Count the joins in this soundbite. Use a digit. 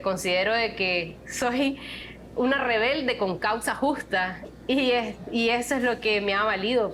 0